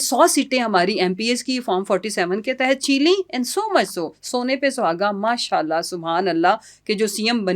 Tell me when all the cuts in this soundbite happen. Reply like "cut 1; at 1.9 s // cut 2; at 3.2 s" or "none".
none